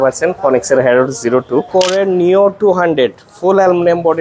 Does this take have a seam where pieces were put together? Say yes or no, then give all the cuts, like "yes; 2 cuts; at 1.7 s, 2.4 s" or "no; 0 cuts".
yes; 1 cut; at 1.7 s